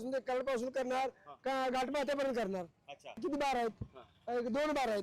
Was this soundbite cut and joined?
yes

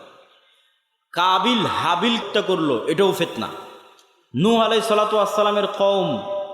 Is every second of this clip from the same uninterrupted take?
no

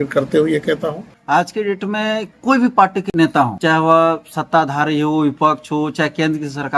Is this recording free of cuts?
no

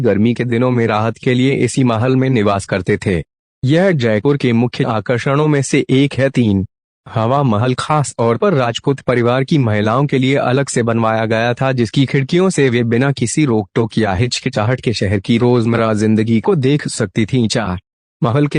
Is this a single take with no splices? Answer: no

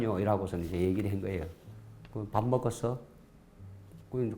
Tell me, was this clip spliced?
yes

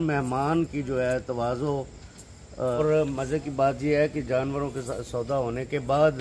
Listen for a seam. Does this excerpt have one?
yes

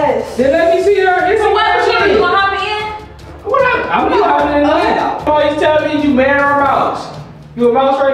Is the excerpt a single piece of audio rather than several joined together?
no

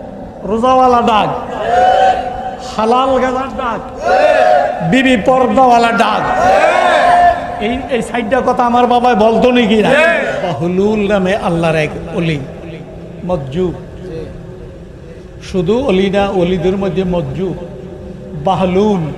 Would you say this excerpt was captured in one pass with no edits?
no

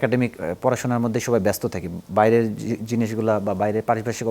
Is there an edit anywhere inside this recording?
no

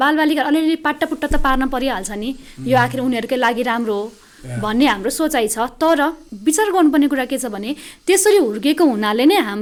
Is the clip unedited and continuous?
yes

